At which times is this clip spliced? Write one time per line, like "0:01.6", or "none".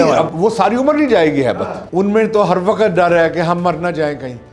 0:01.8